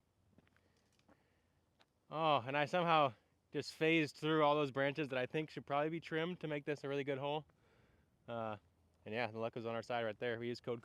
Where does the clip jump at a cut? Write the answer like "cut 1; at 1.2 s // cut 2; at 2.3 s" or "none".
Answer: none